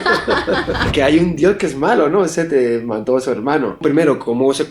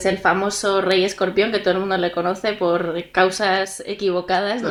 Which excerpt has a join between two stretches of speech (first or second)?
first